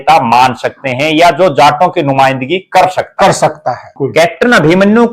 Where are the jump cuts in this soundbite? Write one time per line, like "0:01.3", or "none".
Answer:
0:03.9